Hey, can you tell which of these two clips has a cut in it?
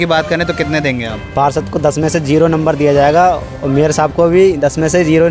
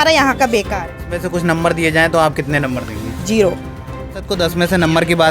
second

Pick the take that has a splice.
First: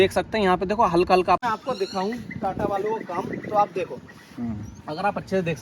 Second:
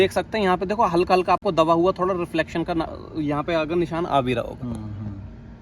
first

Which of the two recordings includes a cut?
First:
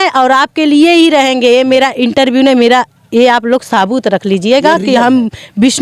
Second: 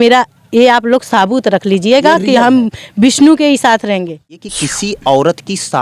second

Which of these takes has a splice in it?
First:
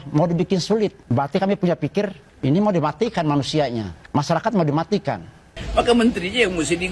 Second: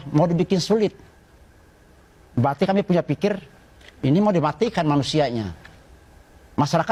first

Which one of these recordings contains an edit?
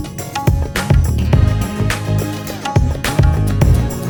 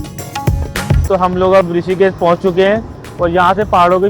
second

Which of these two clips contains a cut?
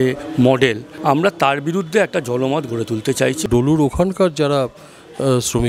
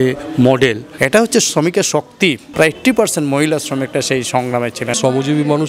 second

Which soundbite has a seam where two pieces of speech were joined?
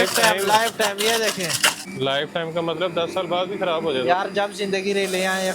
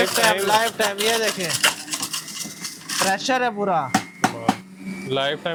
first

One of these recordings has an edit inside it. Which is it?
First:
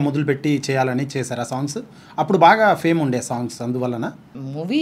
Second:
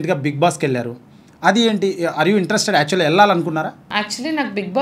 second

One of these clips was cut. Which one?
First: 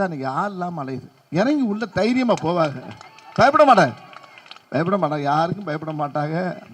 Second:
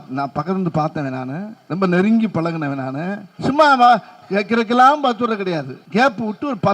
second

